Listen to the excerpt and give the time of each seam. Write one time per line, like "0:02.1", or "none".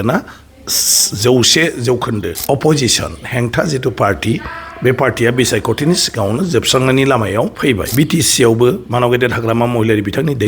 0:02.3
0:07.9